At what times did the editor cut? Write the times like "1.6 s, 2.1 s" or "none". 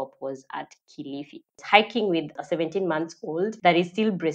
1.6 s, 2.4 s, 3.5 s